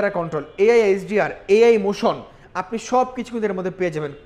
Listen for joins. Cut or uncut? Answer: uncut